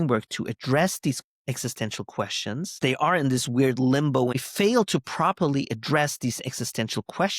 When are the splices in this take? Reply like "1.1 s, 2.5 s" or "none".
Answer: 2.8 s, 4.4 s